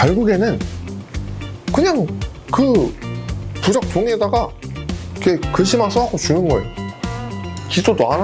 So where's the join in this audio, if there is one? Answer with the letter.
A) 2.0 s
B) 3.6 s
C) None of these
C